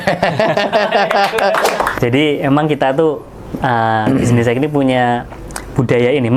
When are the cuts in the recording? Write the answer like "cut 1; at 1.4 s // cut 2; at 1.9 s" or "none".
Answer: cut 1; at 1.9 s